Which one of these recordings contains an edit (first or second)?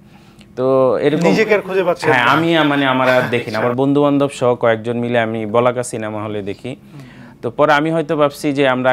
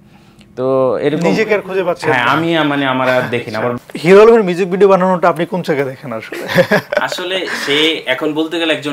second